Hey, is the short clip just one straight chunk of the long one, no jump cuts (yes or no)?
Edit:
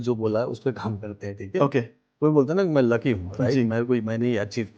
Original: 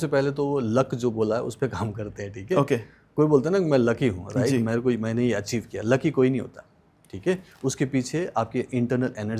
yes